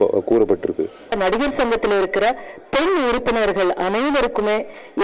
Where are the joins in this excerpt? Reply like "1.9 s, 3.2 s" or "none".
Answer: 1.1 s